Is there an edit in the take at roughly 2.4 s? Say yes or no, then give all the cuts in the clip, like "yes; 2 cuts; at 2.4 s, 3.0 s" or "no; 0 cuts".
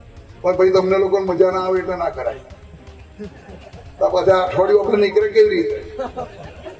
no; 0 cuts